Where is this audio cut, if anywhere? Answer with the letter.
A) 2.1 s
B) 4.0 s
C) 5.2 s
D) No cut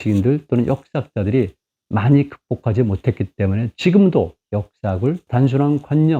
C